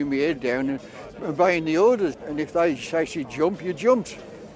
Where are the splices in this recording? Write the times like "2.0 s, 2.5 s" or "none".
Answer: 2.2 s